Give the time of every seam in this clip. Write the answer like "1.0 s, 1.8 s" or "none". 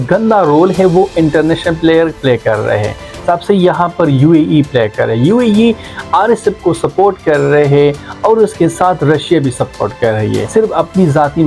none